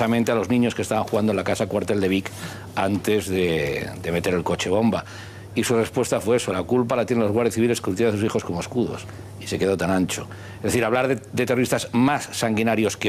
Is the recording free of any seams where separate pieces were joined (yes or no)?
yes